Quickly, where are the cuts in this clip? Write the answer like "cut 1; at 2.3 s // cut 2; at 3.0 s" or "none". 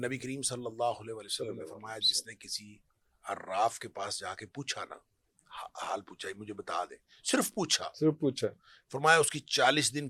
none